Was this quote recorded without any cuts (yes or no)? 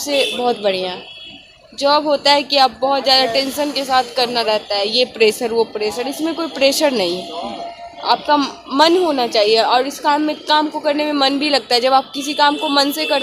yes